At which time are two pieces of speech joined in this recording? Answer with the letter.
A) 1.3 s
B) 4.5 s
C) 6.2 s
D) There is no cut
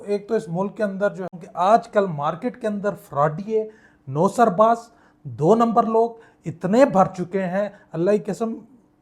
A